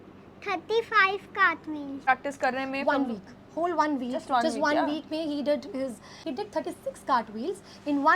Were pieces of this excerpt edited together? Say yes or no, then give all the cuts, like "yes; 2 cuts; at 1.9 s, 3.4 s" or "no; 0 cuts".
yes; 2 cuts; at 2.0 s, 6.1 s